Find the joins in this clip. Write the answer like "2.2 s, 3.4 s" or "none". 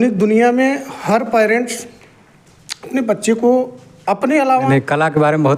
4.5 s